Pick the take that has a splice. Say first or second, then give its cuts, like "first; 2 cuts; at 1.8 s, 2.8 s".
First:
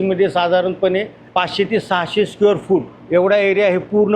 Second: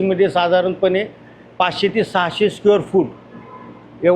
first; 2 cuts; at 1.2 s, 3.0 s